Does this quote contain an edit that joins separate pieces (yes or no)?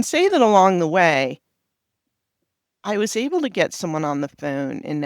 yes